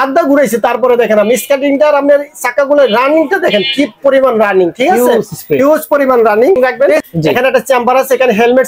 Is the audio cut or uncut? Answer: cut